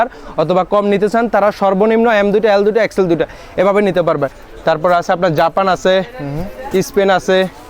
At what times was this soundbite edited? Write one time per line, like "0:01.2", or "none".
0:04.4